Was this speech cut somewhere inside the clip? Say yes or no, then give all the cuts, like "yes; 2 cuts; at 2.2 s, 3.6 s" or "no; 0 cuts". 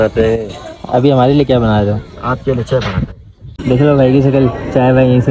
yes; 1 cut; at 3.6 s